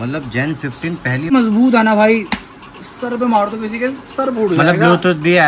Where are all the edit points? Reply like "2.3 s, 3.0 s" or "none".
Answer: 1.3 s